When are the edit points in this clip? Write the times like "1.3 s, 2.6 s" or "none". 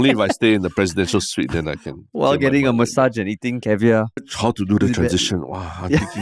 4.2 s